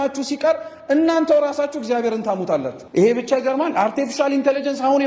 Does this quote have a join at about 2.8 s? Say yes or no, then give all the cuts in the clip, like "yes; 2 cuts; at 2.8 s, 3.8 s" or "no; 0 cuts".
yes; 1 cut; at 2.8 s